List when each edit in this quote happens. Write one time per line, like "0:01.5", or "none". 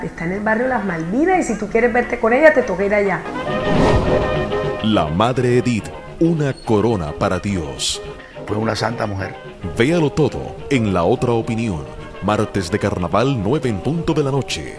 0:03.2
0:06.4